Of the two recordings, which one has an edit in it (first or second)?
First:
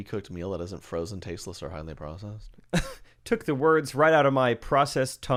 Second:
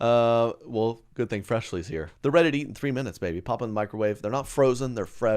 second